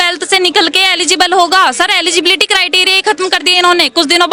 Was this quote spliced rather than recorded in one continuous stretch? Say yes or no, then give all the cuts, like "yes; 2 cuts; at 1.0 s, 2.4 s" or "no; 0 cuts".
no; 0 cuts